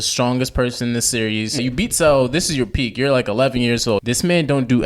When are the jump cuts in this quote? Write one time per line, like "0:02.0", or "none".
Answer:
0:01.6
0:04.0